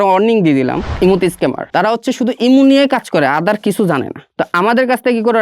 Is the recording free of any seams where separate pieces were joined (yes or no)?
no